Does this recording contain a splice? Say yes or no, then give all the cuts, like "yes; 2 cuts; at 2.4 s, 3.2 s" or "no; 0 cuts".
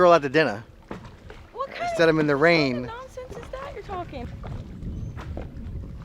yes; 1 cut; at 4.2 s